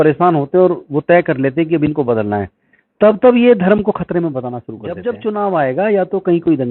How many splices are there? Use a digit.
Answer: 1